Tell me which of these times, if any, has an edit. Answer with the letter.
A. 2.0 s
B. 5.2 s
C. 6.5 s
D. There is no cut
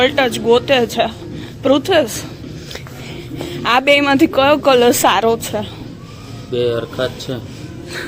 D